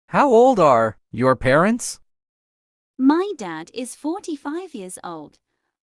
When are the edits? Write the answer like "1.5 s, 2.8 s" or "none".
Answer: 0.9 s